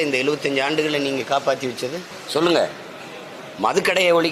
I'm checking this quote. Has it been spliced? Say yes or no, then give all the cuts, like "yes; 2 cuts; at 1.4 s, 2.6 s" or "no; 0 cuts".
yes; 1 cut; at 2.1 s